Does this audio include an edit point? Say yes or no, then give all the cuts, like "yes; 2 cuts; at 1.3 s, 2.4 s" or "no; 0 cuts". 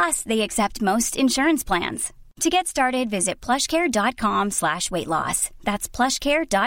no; 0 cuts